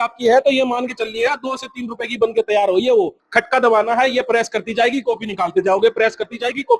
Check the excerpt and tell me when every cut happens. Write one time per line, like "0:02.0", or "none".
0:03.2